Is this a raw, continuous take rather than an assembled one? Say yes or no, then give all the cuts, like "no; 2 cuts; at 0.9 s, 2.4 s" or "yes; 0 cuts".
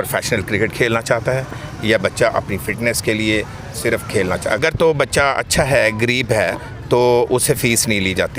no; 1 cut; at 4.6 s